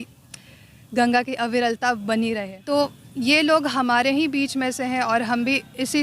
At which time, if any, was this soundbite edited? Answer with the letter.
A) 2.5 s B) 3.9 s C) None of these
A